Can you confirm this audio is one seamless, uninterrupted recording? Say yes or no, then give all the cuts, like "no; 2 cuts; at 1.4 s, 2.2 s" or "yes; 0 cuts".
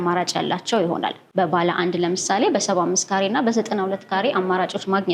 yes; 0 cuts